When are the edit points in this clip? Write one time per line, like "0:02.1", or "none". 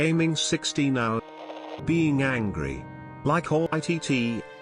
0:01.2
0:03.7